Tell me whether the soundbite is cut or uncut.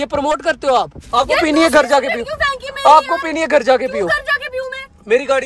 cut